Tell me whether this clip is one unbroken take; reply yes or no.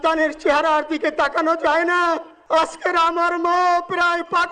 no